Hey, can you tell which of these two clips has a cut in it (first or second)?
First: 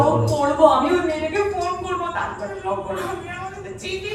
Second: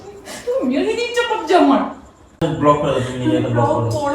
second